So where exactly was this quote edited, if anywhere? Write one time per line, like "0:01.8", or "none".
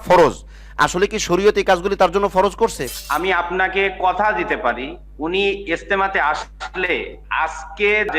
0:02.8

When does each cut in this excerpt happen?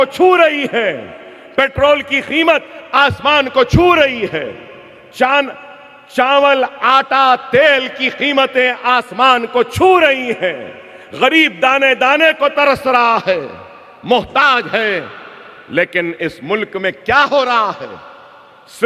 none

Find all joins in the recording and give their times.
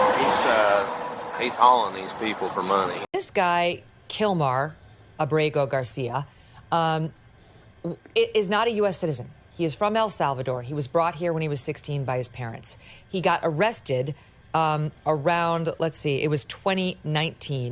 0:03.0

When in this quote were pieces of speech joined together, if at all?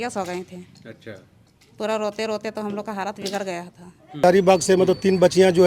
0:04.2

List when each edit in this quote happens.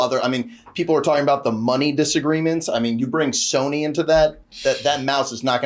none

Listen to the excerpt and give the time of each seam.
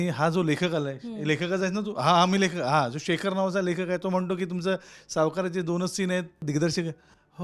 0:06.4

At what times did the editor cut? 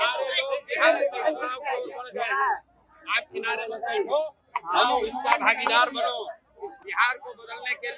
0:06.8

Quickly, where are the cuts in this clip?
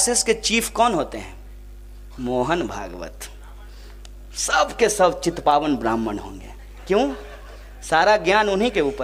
none

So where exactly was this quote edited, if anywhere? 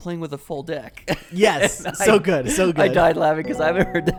none

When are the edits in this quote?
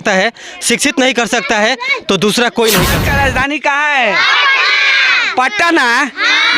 0:03.0

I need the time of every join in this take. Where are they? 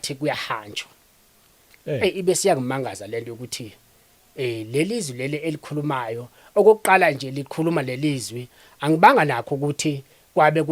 none

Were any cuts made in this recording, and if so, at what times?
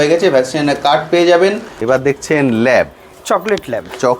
0:01.7

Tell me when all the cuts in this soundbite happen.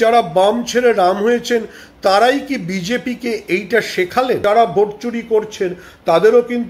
0:04.4

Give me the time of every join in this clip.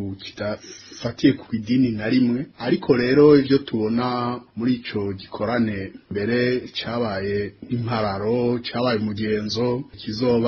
none

